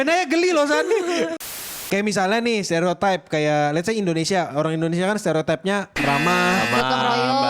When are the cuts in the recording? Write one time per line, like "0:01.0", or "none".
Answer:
0:01.6